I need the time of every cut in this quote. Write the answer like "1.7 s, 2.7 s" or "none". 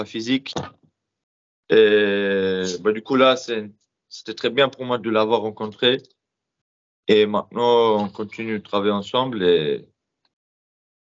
none